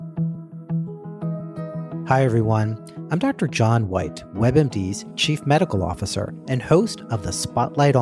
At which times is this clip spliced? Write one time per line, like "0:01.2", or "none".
0:02.1